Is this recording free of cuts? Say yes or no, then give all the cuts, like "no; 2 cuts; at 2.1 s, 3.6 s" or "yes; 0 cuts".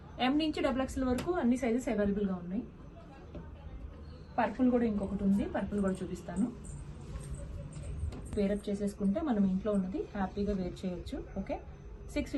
yes; 0 cuts